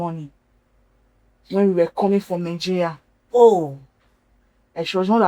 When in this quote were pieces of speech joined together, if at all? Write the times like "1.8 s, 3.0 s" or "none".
none